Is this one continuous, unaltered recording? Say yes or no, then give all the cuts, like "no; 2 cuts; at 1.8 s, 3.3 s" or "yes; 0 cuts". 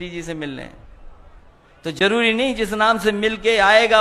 yes; 0 cuts